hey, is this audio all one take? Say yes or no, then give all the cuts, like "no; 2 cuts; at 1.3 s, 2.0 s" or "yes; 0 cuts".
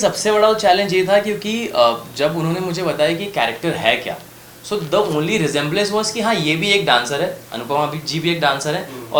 yes; 0 cuts